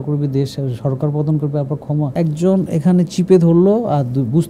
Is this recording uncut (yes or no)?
no